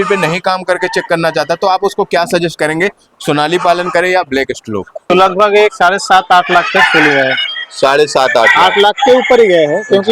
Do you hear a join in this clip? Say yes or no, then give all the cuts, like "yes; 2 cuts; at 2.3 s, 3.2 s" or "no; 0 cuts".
yes; 1 cut; at 5.0 s